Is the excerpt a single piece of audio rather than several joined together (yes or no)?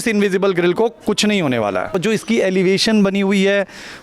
no